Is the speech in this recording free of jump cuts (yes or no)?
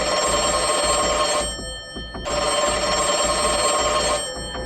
no